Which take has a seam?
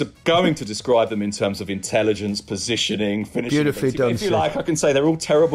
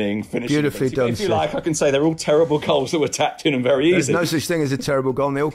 second; 1 cut; at 4.1 s

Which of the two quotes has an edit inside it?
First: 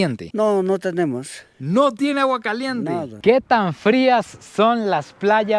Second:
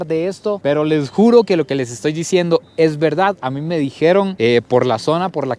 first; 1 cut; at 3.1 s

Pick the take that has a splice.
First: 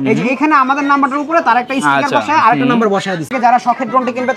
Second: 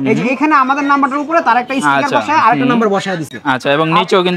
first; 1 cut; at 3.3 s

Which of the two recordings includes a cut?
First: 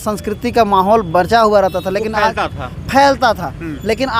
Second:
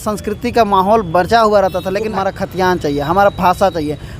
second; 1 cut; at 2.1 s

